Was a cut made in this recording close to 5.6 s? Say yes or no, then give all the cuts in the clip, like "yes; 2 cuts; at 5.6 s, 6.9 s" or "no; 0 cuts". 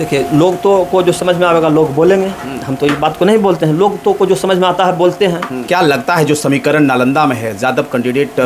yes; 1 cut; at 5.6 s